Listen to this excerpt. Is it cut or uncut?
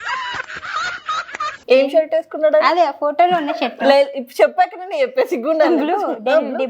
cut